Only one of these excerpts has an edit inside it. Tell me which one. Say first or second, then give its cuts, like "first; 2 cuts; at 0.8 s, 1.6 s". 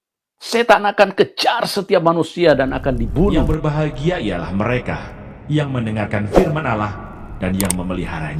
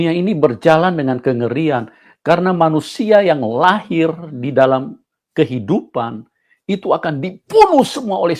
first; 1 cut; at 3.5 s